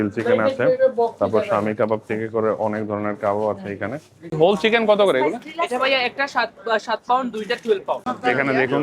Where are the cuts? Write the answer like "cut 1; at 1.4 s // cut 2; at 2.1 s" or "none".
cut 1; at 4.3 s // cut 2; at 8.1 s